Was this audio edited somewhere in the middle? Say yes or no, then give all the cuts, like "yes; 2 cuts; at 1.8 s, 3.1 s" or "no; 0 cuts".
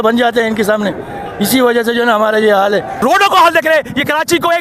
yes; 1 cut; at 2.9 s